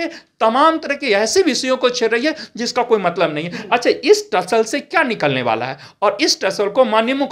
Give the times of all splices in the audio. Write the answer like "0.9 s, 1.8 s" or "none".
none